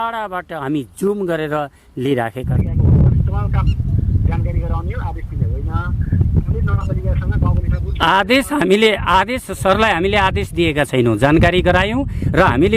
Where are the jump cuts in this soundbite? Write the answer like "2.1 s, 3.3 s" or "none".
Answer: 2.5 s